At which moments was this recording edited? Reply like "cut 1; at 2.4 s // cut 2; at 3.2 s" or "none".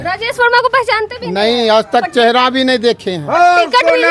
none